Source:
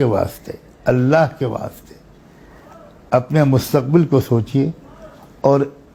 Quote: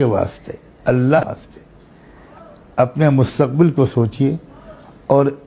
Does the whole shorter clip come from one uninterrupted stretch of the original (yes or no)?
no